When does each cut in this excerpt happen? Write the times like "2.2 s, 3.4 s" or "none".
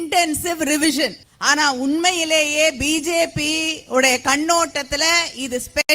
1.3 s